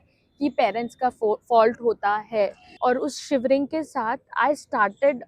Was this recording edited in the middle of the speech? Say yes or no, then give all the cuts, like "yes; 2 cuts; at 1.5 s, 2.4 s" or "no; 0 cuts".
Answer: yes; 1 cut; at 2.6 s